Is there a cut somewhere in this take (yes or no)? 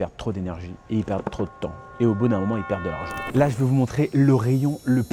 yes